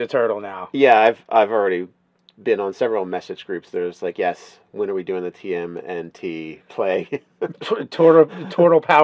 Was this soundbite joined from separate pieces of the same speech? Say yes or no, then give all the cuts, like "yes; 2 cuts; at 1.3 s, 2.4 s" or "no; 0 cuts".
no; 0 cuts